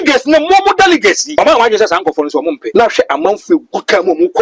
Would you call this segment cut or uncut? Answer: cut